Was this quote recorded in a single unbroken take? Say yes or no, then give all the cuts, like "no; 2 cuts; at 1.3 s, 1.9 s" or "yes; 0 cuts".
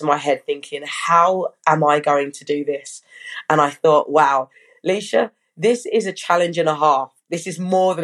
yes; 0 cuts